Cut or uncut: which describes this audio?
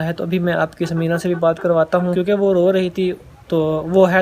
cut